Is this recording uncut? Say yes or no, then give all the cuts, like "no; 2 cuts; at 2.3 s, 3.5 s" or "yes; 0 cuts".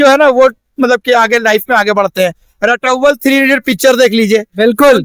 yes; 0 cuts